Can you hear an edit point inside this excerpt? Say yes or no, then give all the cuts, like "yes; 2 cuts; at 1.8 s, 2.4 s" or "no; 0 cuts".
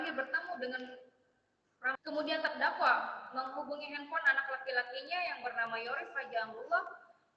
yes; 1 cut; at 2.0 s